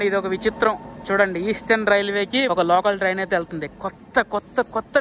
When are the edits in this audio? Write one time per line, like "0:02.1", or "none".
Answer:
none